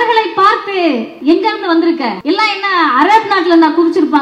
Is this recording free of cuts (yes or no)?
no